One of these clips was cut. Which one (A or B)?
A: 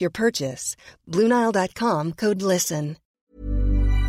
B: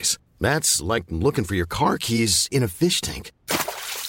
A